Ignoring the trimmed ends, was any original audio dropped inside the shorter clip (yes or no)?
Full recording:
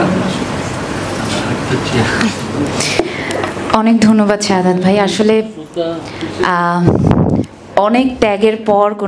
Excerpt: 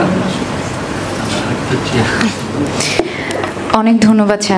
no